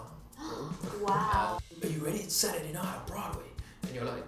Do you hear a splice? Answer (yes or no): yes